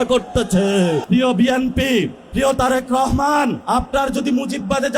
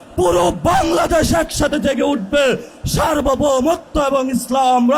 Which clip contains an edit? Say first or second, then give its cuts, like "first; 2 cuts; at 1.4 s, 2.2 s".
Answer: first; 3 cuts; at 1.0 s, 2.2 s, 3.6 s